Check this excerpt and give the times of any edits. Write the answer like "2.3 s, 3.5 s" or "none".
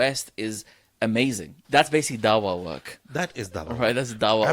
1.5 s